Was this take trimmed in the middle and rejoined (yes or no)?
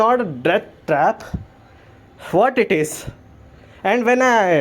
no